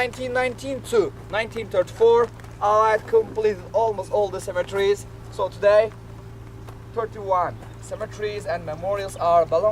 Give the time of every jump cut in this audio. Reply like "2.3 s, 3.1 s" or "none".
none